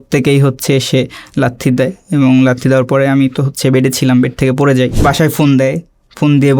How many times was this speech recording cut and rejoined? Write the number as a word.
one